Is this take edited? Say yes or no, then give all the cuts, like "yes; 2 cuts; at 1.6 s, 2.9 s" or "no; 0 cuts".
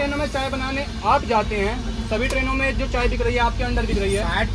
no; 0 cuts